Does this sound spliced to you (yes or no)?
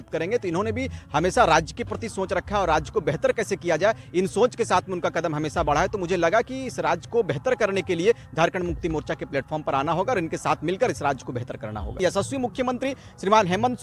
yes